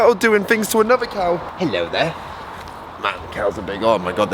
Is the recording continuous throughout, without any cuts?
no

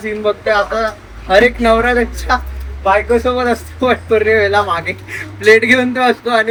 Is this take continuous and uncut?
yes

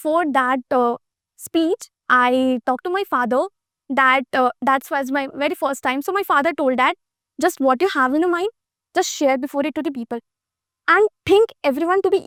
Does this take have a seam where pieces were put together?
no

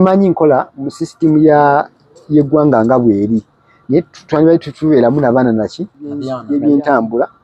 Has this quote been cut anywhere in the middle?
yes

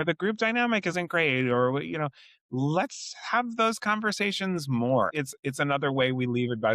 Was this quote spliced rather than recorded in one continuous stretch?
yes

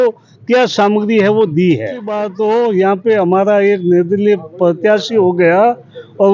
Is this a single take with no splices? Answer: no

